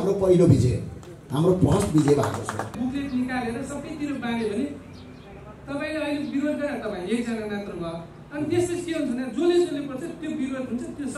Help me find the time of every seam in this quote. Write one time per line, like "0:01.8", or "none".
0:02.7